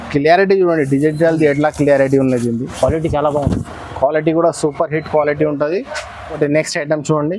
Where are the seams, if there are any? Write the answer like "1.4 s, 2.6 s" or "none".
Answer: 6.3 s